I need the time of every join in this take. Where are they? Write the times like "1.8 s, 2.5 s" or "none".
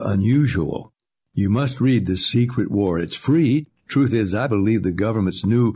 none